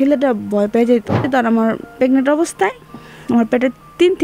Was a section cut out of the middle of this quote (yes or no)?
yes